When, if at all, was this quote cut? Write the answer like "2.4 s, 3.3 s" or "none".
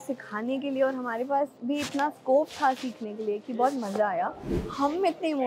4.5 s